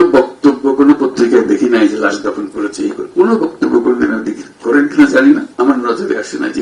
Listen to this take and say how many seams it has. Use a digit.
1